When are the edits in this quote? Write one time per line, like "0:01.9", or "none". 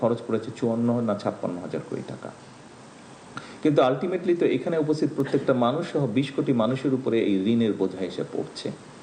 none

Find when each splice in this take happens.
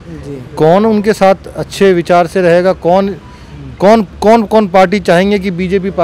none

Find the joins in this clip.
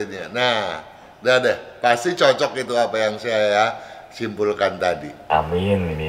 0:05.1

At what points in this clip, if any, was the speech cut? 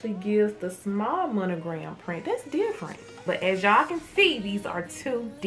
0:03.1

